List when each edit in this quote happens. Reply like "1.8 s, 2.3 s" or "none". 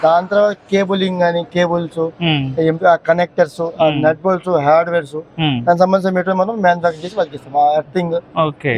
none

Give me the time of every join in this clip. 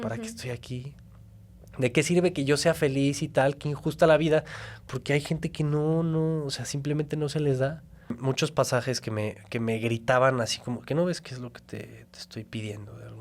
8.2 s

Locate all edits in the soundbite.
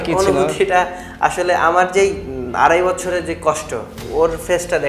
4.0 s

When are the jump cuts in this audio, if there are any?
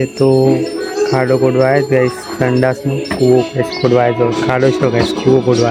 none

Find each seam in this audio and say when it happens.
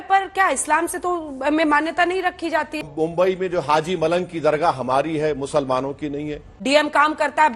2.8 s, 6.5 s

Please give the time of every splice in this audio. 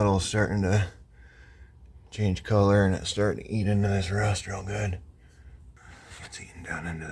5.6 s

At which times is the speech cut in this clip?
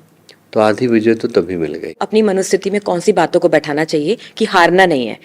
2.0 s

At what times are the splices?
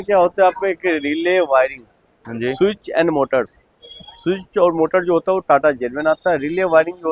none

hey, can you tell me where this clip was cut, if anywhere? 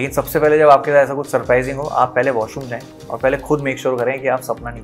none

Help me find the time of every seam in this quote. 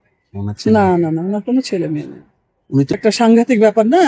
2.9 s

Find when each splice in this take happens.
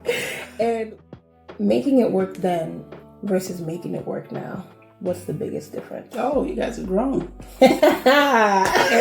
1.3 s

